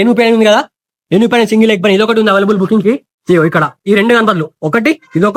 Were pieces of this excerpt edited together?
no; 0 cuts

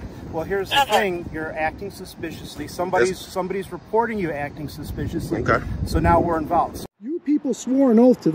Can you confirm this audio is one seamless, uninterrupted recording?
no; 1 cut; at 7.2 s

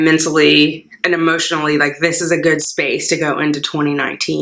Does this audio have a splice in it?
no; 0 cuts

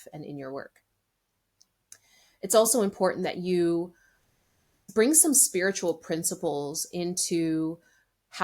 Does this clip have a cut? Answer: yes; 1 cut; at 4.8 s

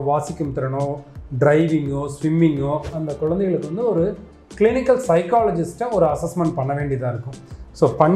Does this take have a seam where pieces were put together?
yes; 1 cut; at 2.9 s

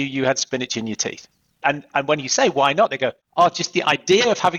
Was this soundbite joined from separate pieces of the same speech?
yes; 2 cuts; at 1.6 s, 3.2 s

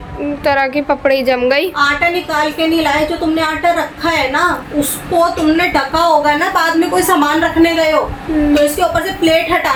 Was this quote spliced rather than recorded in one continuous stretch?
no; 0 cuts

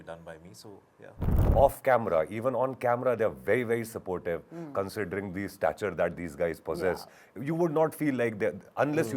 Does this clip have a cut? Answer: yes; 1 cut; at 1.5 s

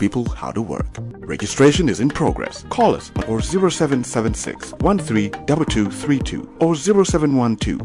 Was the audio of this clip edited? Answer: no; 0 cuts

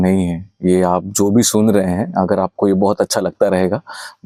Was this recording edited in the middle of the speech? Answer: no; 0 cuts

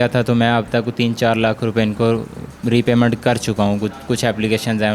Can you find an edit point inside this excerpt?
no; 0 cuts

